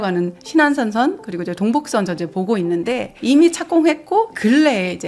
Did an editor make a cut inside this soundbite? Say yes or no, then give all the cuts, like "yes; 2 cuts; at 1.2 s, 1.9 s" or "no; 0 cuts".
no; 0 cuts